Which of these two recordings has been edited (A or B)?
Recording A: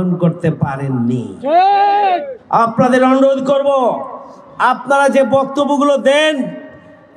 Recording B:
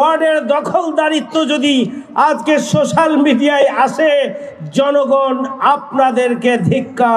A